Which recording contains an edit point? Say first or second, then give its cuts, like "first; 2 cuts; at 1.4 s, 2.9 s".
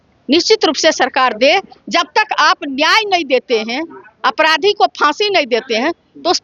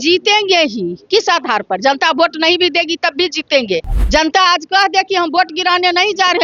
second; 1 cut; at 3.9 s